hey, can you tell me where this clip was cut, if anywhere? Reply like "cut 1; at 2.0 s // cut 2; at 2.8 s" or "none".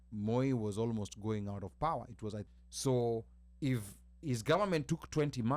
cut 1; at 2.4 s